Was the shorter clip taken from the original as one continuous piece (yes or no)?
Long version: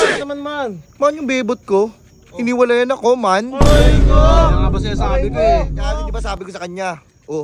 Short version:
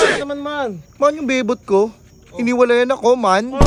yes